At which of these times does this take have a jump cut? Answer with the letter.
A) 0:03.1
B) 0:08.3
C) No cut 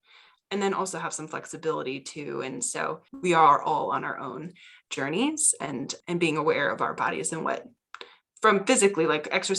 A